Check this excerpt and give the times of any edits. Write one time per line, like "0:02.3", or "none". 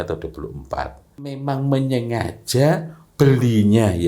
0:01.4